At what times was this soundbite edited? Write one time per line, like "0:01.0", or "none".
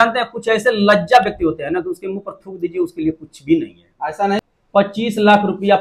0:04.4